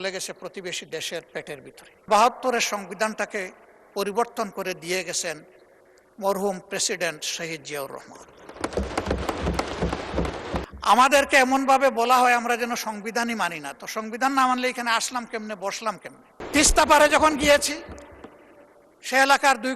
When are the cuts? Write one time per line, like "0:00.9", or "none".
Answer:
0:02.1
0:10.7
0:16.4